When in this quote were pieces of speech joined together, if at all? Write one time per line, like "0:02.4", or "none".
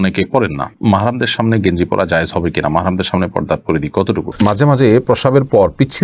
0:04.4